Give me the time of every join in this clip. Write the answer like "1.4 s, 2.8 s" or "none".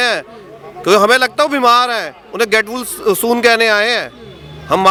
none